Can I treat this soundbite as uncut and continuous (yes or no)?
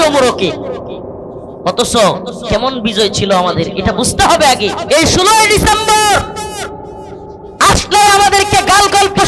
no